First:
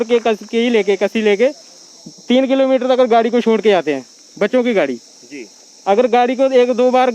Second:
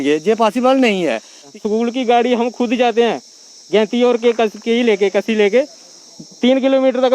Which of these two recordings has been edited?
second; 1 cut; at 1.5 s

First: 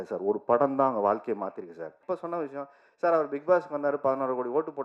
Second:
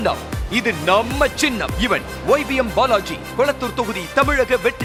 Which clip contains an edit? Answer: first; 1 cut; at 2.0 s

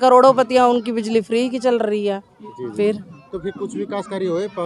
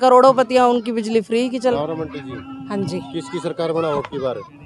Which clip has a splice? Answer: second; 1 cut; at 1.8 s

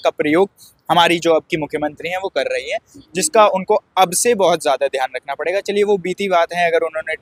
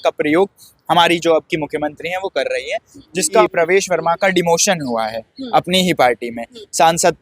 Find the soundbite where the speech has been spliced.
second; 1 cut; at 3.4 s

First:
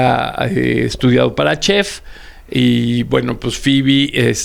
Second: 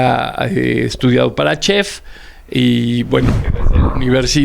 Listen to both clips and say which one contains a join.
second; 1 cut; at 3.3 s

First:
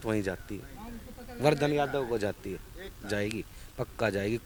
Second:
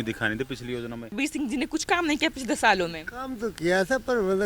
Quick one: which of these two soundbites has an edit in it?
second; 1 cut; at 1.1 s

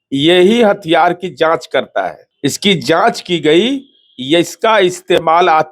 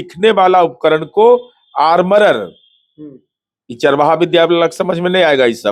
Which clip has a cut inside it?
first; 1 cut; at 2.2 s

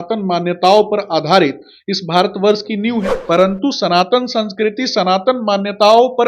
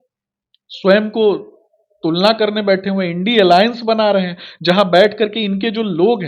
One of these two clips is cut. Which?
first; 1 cut; at 3.1 s

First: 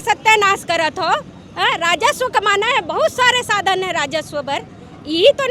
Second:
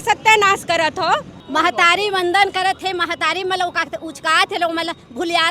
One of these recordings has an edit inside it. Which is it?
second; 1 cut; at 1.4 s

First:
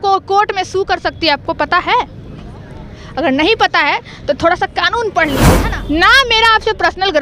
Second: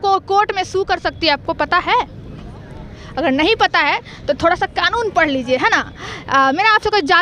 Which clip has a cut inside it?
first; 1 cut; at 5.5 s

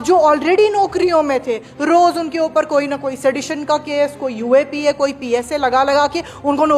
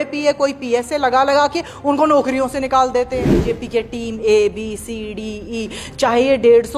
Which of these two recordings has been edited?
second; 1 cut; at 3.4 s

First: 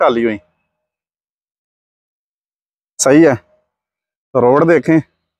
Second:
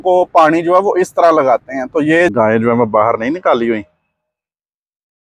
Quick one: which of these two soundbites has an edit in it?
second; 1 cut; at 2.3 s

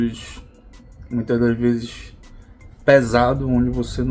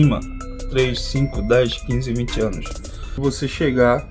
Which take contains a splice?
second; 1 cut; at 3.2 s

